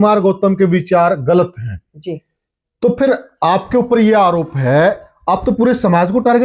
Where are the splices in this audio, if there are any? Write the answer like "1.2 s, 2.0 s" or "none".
none